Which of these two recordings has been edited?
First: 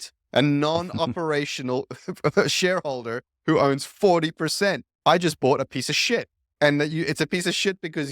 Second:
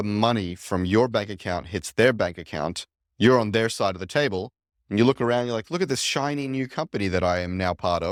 first; 2 cuts; at 4.9 s, 6.4 s

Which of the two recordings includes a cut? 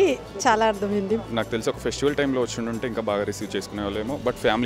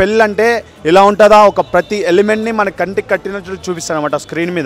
first; 1 cut; at 1.3 s

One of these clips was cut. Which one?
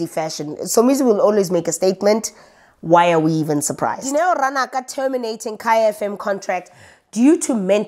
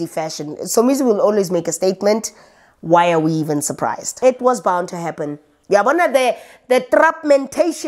second; 1 cut; at 4.0 s

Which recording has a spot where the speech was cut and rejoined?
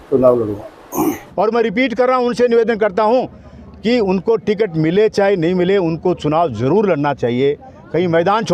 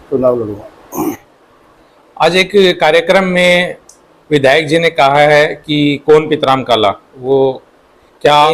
first; 1 cut; at 1.2 s

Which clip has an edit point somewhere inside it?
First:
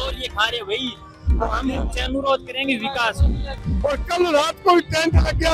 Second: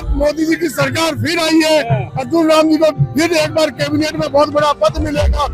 first; 1 cut; at 3.7 s

